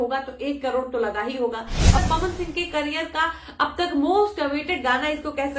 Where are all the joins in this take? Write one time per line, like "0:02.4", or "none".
0:02.0